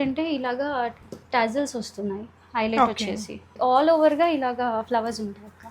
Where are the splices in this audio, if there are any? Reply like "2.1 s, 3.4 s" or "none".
3.5 s